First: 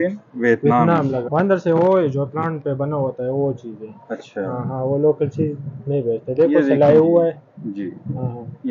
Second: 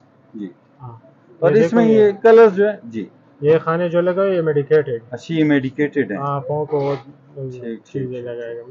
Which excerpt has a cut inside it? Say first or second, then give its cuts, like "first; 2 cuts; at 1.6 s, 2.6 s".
first; 1 cut; at 1.2 s